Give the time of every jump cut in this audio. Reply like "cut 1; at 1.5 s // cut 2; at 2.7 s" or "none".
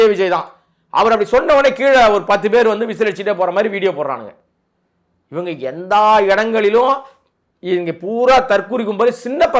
none

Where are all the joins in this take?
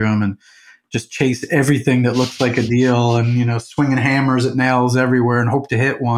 none

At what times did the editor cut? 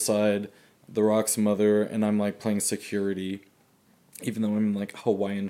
none

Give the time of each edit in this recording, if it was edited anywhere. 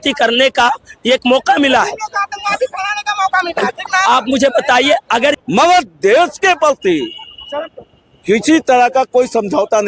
cut 1; at 5.4 s

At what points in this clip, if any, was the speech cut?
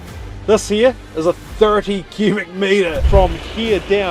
cut 1; at 3.0 s

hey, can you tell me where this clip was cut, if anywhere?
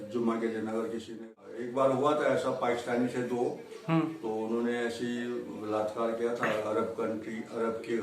cut 1; at 1.4 s

